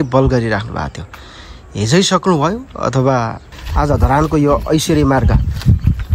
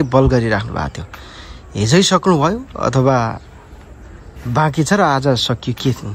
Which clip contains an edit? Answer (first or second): first